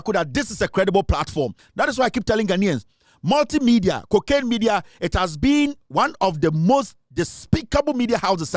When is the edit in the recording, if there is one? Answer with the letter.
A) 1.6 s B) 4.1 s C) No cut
A